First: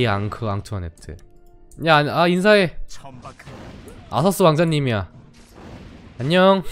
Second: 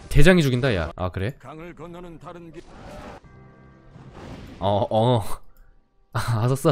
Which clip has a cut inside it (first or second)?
second